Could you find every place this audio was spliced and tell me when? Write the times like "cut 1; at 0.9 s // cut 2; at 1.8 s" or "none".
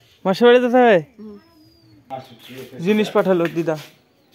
cut 1; at 2.0 s